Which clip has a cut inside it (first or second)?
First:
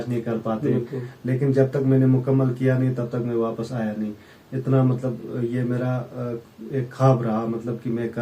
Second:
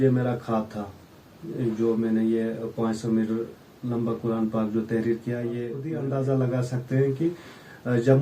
second